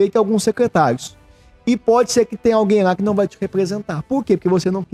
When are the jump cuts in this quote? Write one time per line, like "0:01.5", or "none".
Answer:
none